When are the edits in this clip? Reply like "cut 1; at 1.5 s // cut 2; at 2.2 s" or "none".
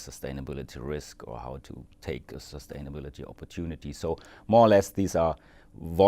cut 1; at 2.3 s